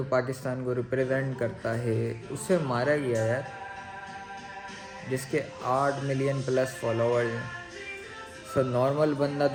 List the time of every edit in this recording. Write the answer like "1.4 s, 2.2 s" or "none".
none